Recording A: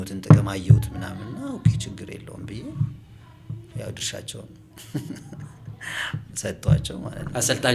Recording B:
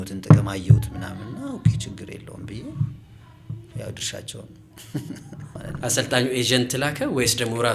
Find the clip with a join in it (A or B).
B